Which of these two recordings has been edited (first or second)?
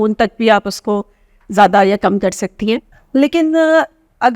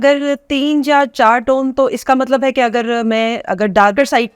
first